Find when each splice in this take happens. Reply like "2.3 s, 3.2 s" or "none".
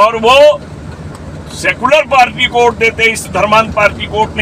none